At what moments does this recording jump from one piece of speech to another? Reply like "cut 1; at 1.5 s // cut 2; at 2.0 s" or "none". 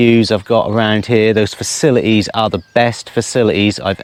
none